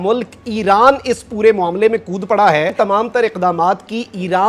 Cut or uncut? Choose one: cut